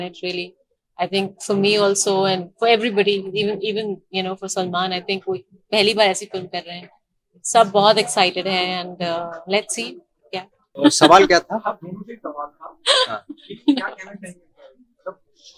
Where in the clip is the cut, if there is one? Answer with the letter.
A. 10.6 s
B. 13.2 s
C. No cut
A